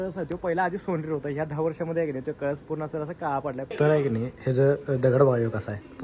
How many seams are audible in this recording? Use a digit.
1